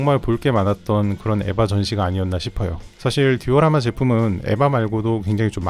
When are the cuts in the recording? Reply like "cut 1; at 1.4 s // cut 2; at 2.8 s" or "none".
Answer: none